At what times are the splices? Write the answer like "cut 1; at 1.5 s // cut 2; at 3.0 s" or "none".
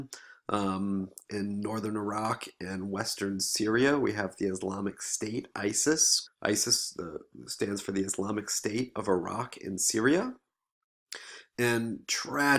cut 1; at 3.5 s